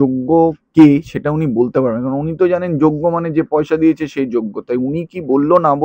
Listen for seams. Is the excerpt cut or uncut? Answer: uncut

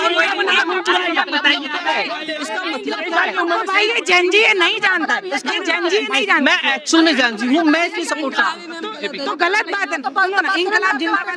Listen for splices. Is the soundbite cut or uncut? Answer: uncut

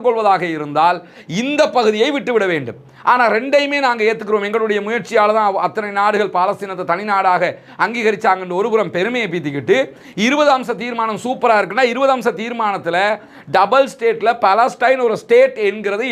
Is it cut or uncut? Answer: uncut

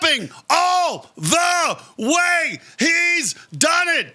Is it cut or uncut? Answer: uncut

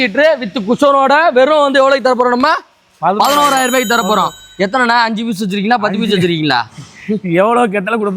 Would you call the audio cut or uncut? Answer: uncut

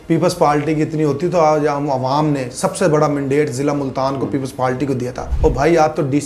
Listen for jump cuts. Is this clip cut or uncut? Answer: cut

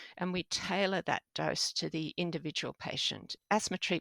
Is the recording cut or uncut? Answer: uncut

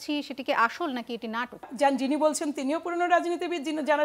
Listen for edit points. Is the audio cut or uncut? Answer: cut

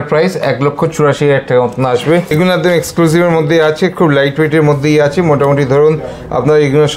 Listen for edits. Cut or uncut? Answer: cut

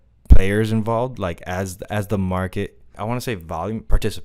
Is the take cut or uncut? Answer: cut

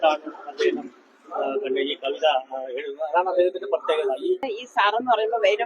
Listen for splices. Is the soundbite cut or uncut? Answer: cut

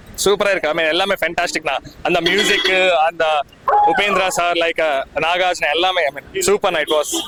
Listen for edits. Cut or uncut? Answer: uncut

